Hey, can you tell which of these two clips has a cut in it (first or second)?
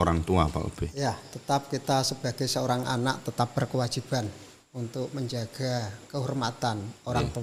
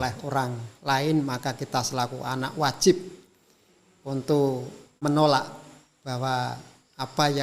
second